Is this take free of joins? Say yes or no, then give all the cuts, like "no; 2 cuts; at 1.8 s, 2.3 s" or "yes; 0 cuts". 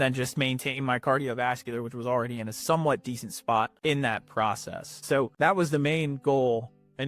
no; 2 cuts; at 3.7 s, 5.3 s